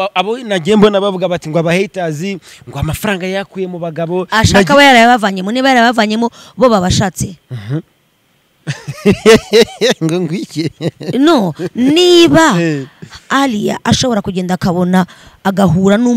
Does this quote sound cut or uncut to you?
uncut